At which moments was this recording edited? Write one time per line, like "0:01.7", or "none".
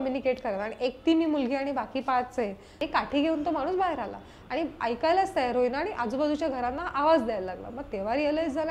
0:02.7